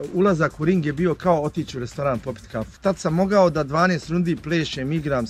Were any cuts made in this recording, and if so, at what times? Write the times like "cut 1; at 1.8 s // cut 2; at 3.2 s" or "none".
cut 1; at 2.7 s